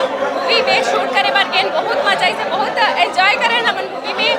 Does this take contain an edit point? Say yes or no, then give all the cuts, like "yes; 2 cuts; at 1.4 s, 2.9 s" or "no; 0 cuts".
no; 0 cuts